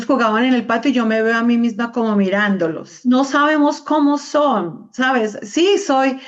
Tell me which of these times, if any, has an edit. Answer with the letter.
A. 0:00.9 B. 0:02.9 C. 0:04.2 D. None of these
B